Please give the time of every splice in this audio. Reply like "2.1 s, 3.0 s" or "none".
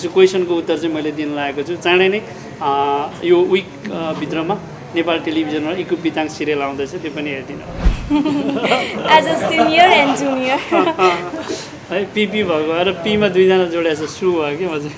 7.9 s

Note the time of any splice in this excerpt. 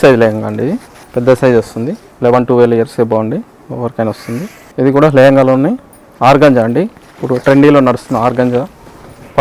0.9 s, 2.0 s, 4.6 s

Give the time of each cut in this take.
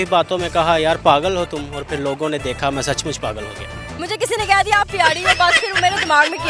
3.9 s

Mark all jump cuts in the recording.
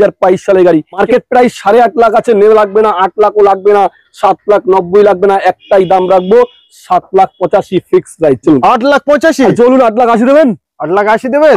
1.0 s, 8.6 s

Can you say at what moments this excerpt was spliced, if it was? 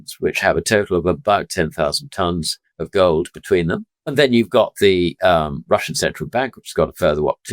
3.9 s

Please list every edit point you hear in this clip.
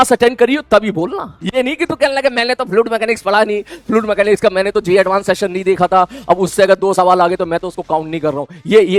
none

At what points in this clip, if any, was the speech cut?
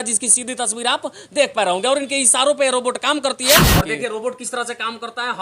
3.6 s

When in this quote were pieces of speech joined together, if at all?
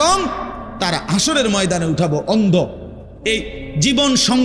none

